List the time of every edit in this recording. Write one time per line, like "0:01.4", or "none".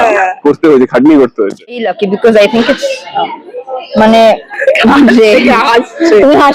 0:01.8